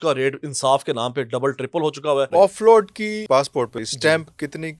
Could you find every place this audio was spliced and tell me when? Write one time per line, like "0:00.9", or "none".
0:02.3
0:03.8